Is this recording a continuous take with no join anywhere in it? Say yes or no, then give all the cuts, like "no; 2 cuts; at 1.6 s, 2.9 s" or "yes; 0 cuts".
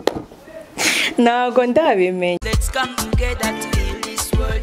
no; 1 cut; at 2.4 s